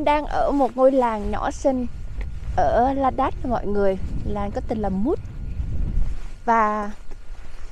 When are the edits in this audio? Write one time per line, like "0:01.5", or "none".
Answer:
none